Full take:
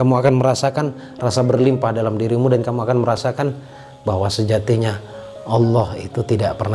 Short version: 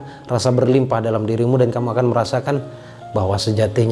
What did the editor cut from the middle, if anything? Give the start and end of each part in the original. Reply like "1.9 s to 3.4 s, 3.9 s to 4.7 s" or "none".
none